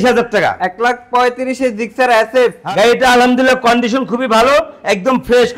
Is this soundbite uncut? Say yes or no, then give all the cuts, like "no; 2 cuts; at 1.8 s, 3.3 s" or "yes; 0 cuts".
no; 1 cut; at 2.6 s